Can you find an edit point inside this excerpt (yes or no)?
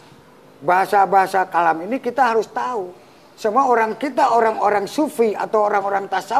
no